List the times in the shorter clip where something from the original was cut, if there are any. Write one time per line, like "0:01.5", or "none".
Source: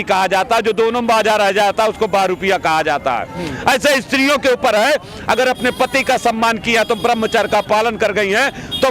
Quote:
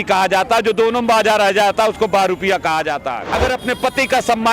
0:03.2